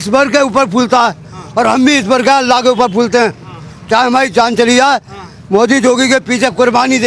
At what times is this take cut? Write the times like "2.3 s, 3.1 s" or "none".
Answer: none